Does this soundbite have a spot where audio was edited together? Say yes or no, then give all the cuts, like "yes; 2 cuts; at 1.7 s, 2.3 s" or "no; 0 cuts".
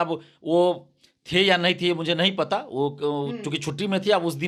no; 0 cuts